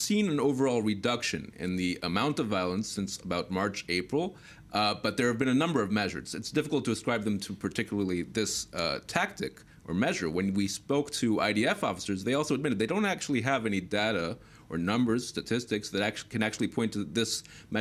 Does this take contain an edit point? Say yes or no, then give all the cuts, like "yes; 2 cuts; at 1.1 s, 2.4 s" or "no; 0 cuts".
no; 0 cuts